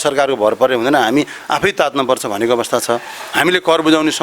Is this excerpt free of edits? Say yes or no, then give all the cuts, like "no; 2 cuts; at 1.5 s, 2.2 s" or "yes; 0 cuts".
yes; 0 cuts